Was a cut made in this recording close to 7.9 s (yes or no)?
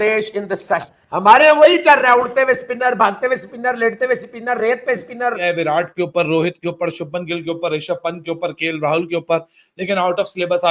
no